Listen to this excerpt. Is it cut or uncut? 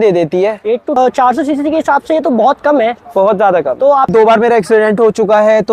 cut